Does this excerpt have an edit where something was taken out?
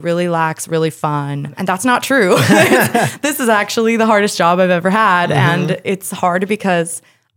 yes; 1 cut; at 1.5 s

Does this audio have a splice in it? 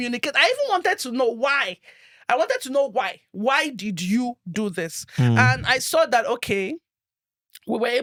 no; 0 cuts

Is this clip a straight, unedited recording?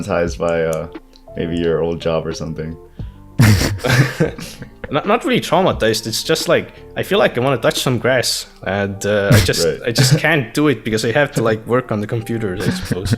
yes; 0 cuts

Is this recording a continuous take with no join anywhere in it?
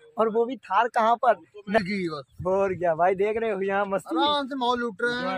no; 1 cut; at 1.8 s

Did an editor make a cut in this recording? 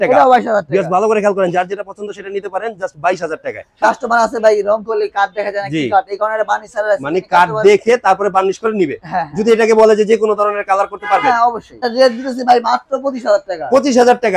yes; 2 cuts; at 3.8 s, 11.7 s

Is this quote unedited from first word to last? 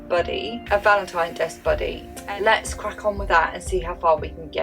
no; 1 cut; at 2.1 s

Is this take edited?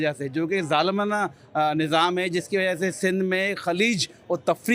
no; 0 cuts

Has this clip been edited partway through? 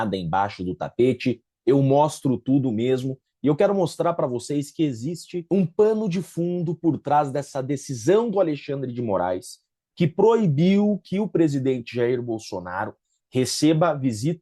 no; 0 cuts

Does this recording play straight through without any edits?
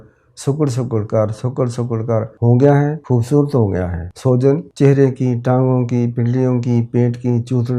no; 4 cuts; at 2.3 s, 3.0 s, 4.0 s, 4.7 s

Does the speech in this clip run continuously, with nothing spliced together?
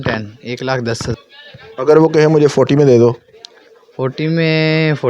no; 1 cut; at 1.1 s

